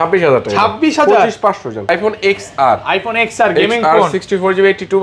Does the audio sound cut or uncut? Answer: cut